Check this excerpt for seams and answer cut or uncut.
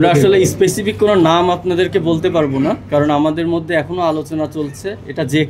uncut